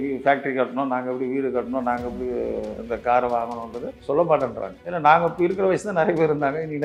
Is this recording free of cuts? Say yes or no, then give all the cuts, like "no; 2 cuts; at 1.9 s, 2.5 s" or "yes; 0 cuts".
yes; 0 cuts